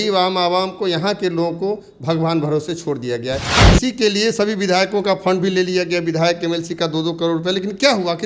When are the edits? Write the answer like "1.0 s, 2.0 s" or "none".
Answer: 3.5 s